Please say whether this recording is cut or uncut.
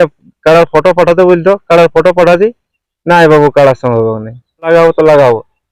cut